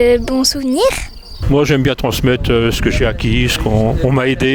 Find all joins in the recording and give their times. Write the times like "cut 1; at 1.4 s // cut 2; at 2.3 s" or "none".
cut 1; at 1.3 s

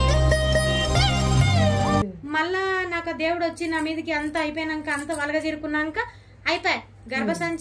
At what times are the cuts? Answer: cut 1; at 2.0 s

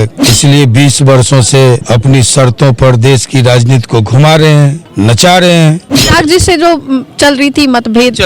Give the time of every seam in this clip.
cut 1; at 5.9 s

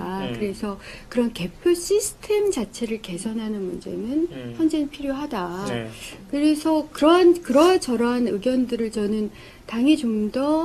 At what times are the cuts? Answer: none

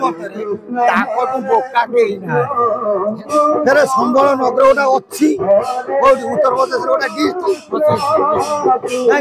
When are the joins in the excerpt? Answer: cut 1; at 3.3 s

